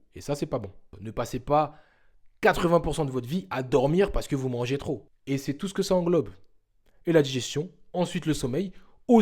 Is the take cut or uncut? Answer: cut